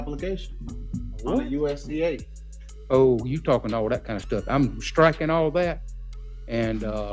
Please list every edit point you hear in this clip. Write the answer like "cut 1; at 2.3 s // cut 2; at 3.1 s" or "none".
none